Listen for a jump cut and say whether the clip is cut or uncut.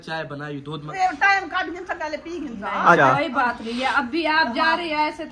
cut